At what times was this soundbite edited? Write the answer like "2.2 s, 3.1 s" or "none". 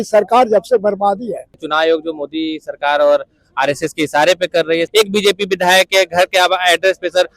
1.6 s, 4.9 s

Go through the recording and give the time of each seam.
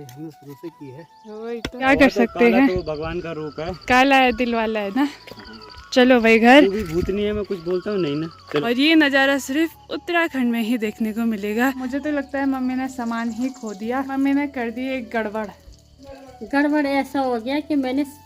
1.9 s, 8.6 s, 11.9 s, 14.1 s

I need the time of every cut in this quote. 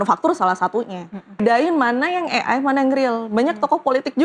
1.4 s

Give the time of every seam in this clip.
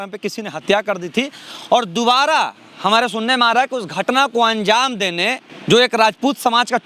5.5 s

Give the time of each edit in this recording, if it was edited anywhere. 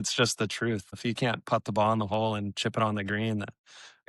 0.9 s

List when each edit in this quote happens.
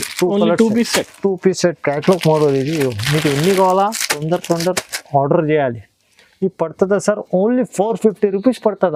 none

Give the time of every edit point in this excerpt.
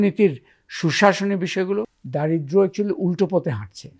2.0 s

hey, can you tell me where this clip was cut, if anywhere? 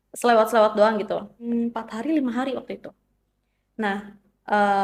1.4 s

